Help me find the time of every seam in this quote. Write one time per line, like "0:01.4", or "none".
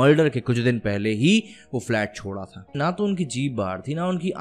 0:02.7